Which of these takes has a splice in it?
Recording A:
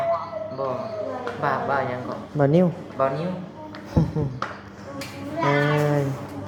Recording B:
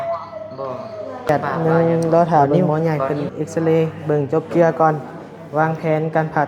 B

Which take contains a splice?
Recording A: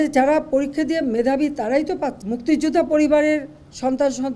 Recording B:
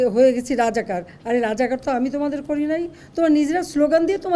A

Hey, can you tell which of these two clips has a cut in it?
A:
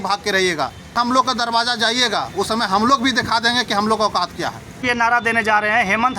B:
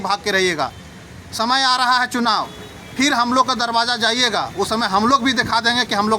A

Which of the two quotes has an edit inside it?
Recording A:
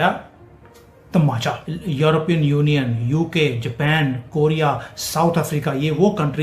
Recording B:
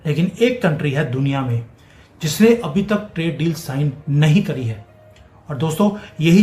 A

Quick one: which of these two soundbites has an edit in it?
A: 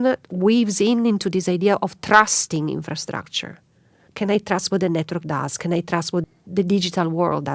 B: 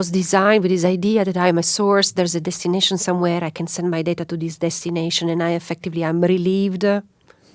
A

